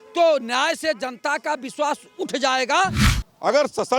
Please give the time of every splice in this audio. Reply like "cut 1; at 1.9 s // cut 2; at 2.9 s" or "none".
cut 1; at 3.0 s